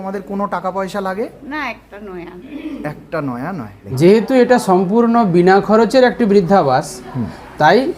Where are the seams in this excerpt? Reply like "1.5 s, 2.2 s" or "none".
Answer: 3.9 s